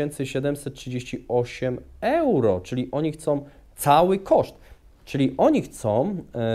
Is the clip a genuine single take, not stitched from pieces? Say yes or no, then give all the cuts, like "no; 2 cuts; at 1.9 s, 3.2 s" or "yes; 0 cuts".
yes; 0 cuts